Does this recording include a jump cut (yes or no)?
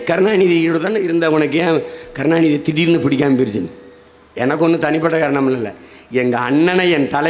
no